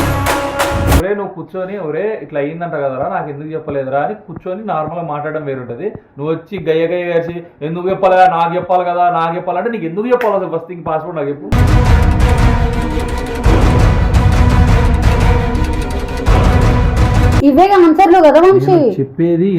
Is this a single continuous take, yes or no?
no